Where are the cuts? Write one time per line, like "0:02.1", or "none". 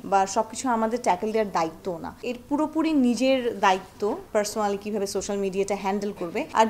none